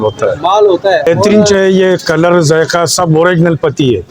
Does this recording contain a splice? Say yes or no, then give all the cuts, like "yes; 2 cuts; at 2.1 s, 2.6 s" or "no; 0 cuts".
yes; 1 cut; at 1.1 s